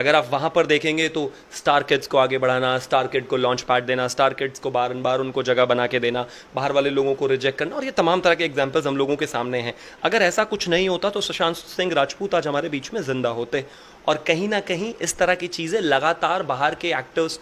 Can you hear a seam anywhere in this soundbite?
no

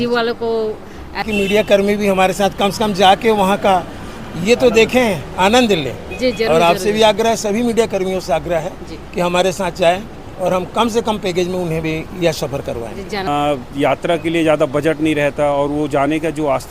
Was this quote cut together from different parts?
yes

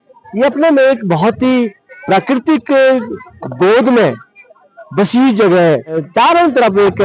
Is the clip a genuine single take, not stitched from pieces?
no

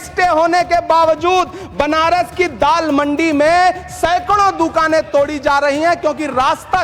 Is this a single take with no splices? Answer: yes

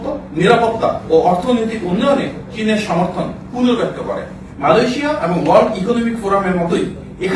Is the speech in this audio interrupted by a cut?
yes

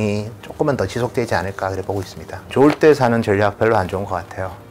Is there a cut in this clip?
yes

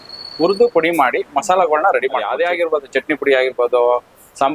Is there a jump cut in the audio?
yes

